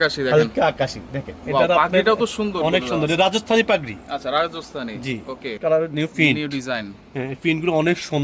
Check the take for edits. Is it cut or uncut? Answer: cut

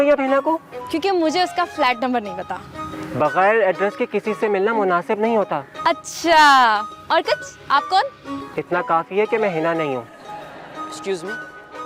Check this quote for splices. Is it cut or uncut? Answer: uncut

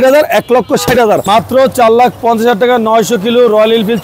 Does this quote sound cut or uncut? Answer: cut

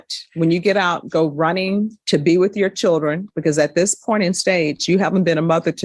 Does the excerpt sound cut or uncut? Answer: uncut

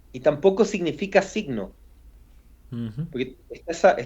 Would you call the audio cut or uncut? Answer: uncut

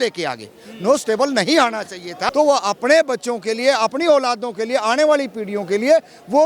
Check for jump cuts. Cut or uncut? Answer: cut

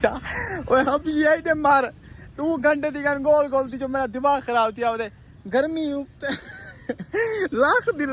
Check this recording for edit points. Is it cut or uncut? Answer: uncut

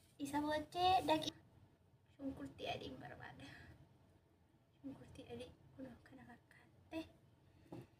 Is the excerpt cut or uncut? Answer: cut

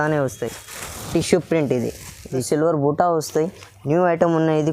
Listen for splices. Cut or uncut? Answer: cut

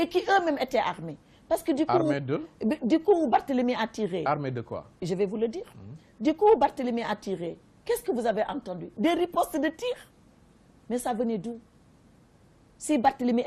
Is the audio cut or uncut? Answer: cut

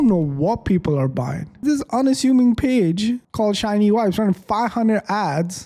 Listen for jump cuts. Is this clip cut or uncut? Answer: uncut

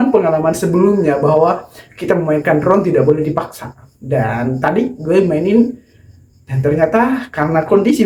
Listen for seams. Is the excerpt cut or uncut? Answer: uncut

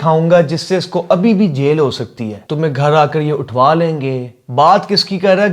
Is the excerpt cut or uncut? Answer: cut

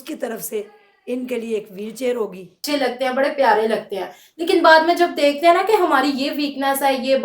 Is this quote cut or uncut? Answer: cut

